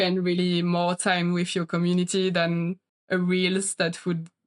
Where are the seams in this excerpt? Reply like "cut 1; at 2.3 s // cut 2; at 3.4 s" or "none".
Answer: cut 1; at 3.0 s